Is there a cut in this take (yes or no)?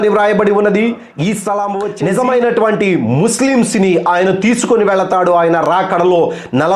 yes